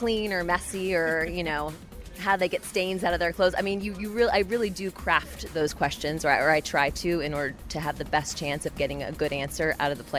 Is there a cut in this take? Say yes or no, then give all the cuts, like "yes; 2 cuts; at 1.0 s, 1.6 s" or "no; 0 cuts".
no; 0 cuts